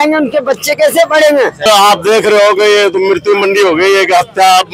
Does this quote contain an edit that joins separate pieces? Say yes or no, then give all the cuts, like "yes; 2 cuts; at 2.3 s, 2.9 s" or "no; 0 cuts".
yes; 1 cut; at 1.6 s